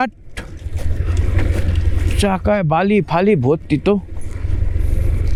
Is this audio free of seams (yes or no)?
yes